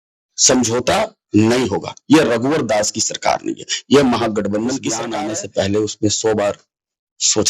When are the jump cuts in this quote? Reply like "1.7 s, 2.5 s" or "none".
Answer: 5.1 s

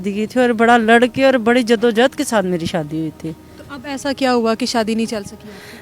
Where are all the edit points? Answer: none

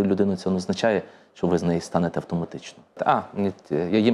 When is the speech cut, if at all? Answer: 3.0 s

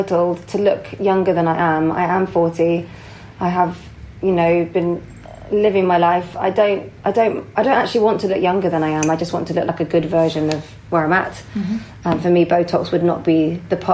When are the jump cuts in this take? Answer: none

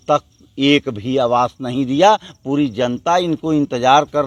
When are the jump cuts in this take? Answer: none

